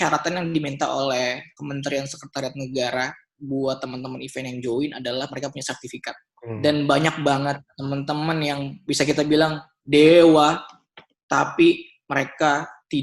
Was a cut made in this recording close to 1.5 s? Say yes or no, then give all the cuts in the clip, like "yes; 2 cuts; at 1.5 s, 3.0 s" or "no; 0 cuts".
yes; 2 cuts; at 1.5 s, 6.3 s